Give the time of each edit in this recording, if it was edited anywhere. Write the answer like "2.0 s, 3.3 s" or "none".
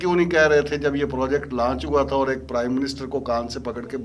none